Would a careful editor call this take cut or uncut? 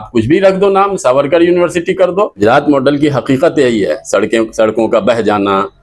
cut